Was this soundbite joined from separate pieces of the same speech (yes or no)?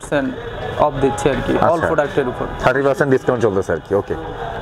no